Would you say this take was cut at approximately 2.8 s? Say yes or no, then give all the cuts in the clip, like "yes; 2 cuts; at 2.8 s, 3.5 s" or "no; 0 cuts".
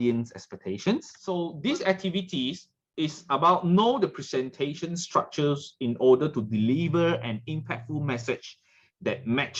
no; 1 cut; at 1.2 s